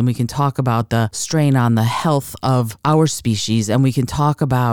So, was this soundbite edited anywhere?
yes; 2 cuts; at 1.2 s, 2.7 s

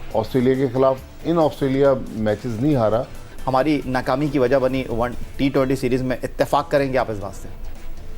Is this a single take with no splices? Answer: no; 1 cut; at 3.4 s

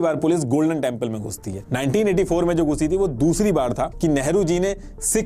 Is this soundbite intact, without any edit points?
no; 1 cut; at 3.9 s

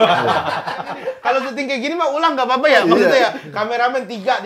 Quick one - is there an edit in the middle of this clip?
yes; 1 cut; at 1.0 s

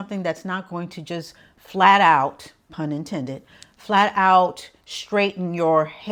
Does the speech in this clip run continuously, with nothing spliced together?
yes; 0 cuts

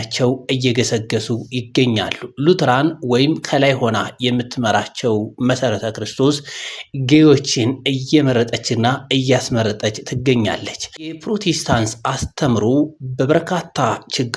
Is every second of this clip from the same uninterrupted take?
no; 1 cut; at 11.1 s

